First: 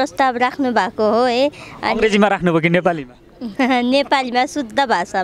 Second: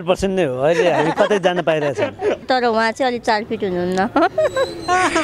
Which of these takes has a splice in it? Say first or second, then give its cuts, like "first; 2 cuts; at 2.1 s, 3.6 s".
second; 1 cut; at 2.4 s